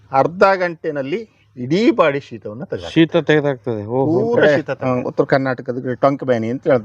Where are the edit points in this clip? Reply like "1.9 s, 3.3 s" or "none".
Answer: 4.5 s